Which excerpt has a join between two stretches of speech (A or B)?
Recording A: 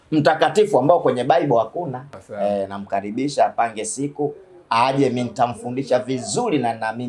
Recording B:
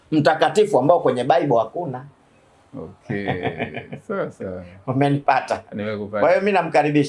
A